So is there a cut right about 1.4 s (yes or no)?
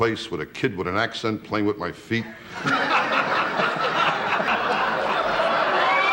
no